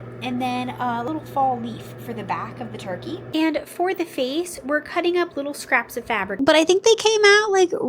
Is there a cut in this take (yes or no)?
yes